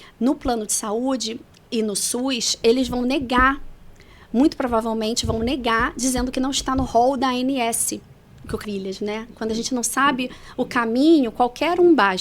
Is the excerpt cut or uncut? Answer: cut